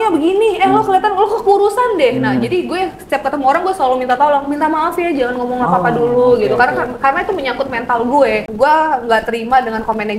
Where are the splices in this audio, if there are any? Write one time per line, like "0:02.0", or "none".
0:08.4